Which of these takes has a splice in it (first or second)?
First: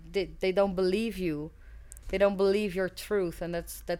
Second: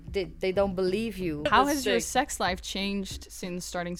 second